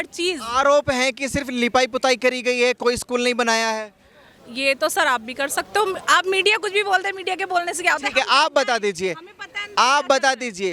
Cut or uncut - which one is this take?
uncut